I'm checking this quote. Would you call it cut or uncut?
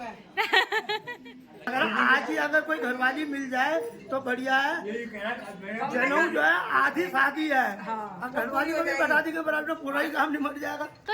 cut